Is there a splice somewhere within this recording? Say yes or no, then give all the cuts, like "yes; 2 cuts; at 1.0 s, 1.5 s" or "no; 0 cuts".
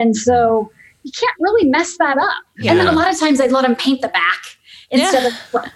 yes; 1 cut; at 2.6 s